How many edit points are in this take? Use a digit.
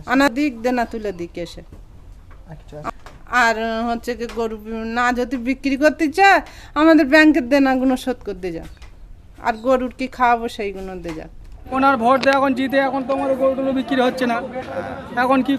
1